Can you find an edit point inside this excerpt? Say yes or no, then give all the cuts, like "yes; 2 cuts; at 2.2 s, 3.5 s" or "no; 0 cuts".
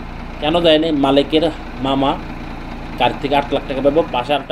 no; 0 cuts